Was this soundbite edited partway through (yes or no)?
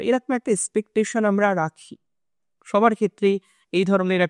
no